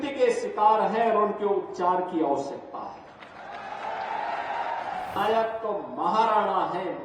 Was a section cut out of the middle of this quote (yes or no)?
yes